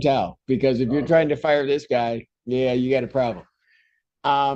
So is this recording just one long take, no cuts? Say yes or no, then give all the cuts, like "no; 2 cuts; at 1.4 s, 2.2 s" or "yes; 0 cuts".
yes; 0 cuts